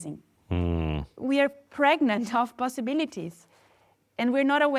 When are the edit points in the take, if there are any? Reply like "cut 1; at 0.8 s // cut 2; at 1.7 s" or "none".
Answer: cut 1; at 1.2 s